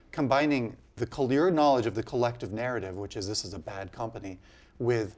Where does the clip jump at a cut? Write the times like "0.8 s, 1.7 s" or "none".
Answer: 1.0 s